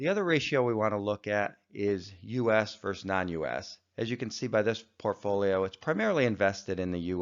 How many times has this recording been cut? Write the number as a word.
one